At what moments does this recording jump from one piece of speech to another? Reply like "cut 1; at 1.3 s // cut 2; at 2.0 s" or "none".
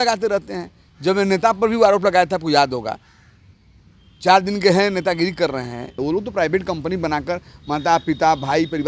cut 1; at 5.9 s

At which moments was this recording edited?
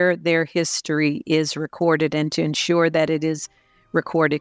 none

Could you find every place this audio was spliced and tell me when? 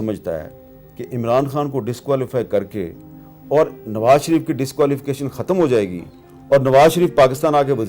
none

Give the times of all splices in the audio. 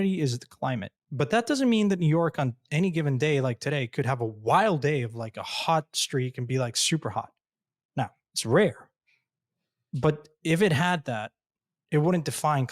cut 1; at 1.0 s

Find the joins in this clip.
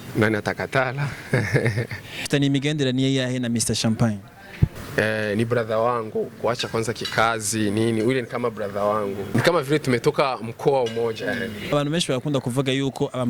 cut 1; at 2.3 s // cut 2; at 4.8 s // cut 3; at 9.2 s // cut 4; at 11.6 s

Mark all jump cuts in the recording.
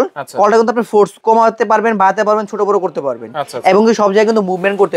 cut 1; at 1.2 s

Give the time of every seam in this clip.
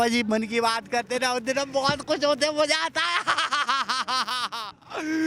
none

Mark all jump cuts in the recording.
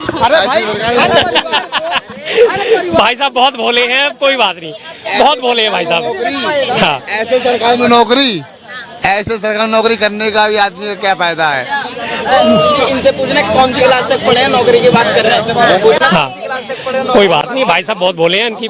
none

